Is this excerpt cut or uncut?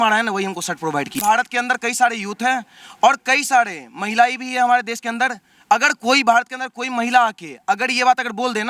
cut